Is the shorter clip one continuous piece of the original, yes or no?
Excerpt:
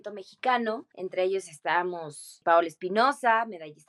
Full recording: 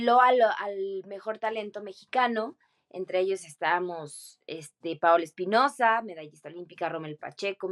no